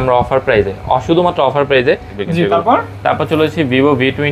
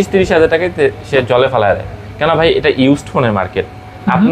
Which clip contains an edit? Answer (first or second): first